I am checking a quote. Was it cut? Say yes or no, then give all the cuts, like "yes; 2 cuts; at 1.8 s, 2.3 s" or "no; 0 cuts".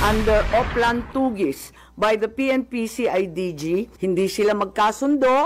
yes; 1 cut; at 3.9 s